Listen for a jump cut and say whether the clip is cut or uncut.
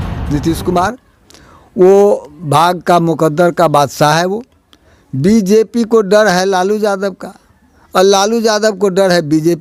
uncut